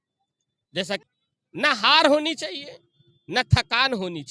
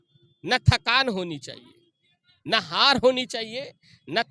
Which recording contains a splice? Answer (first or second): first